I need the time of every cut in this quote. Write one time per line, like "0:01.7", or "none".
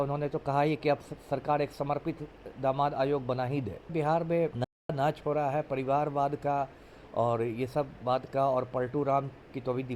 0:03.9
0:04.9